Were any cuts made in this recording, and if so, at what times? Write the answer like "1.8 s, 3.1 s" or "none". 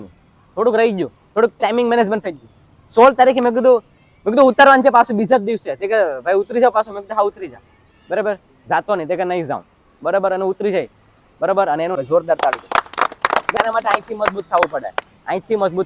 11.9 s, 13.5 s